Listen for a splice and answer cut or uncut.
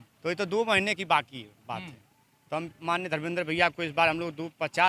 uncut